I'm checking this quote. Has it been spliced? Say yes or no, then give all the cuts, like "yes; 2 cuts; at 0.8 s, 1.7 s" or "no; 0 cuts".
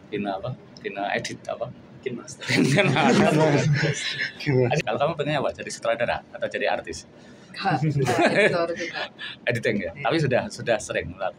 yes; 1 cut; at 4.8 s